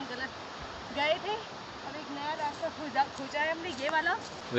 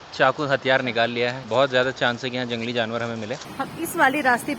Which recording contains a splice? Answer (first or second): second